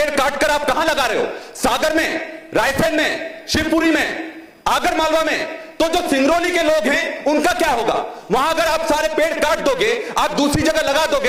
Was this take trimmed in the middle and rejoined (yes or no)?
no